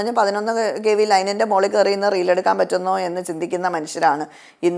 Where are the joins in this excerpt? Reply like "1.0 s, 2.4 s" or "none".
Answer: none